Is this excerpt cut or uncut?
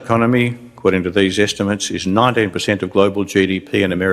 cut